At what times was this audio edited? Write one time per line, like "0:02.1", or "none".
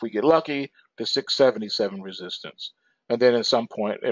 0:02.0